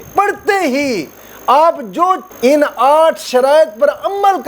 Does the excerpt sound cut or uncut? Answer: cut